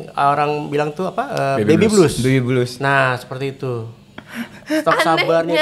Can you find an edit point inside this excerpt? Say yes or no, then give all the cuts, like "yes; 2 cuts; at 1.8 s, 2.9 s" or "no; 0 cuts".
no; 0 cuts